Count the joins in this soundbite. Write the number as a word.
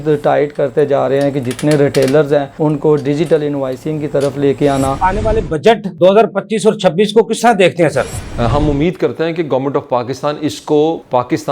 two